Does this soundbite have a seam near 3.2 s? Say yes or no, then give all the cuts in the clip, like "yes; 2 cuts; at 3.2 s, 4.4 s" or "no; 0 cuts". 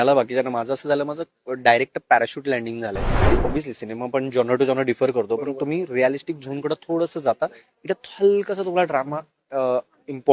yes; 1 cut; at 3.2 s